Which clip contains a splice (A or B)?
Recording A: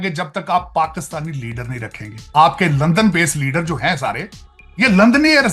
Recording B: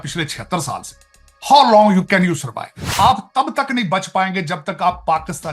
B